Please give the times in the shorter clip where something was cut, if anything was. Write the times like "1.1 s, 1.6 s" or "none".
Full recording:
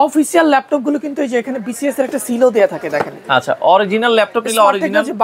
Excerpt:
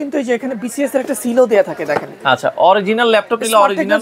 none